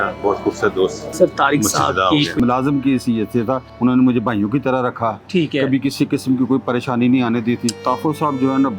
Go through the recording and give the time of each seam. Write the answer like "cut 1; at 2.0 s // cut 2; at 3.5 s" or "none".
cut 1; at 1.0 s // cut 2; at 2.4 s // cut 3; at 3.7 s // cut 4; at 7.8 s